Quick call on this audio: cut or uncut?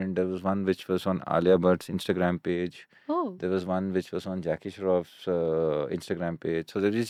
uncut